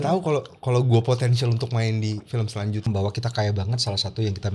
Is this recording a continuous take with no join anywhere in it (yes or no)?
no